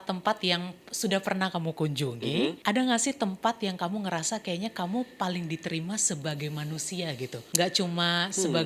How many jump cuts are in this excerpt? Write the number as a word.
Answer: two